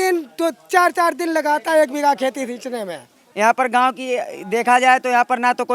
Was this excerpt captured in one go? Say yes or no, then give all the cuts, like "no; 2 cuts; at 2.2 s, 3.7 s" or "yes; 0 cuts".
no; 1 cut; at 3.2 s